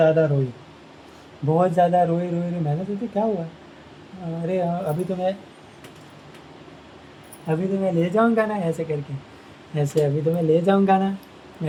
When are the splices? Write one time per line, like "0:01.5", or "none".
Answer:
none